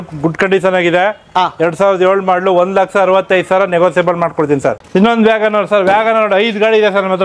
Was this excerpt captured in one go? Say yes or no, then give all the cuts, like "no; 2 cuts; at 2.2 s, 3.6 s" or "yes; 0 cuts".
no; 1 cut; at 4.8 s